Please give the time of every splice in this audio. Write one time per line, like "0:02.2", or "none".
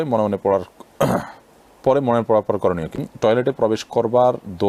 0:02.9